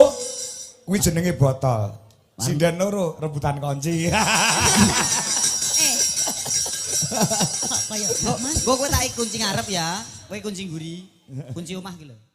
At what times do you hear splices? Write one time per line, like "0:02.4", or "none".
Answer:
none